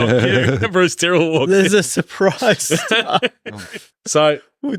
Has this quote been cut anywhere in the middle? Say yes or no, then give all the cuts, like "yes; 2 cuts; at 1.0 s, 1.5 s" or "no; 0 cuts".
no; 0 cuts